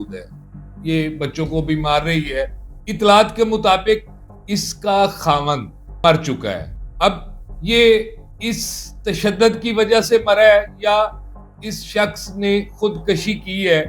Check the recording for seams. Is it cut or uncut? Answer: uncut